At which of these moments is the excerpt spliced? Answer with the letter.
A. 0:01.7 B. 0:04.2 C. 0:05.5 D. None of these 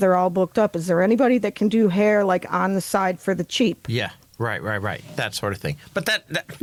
D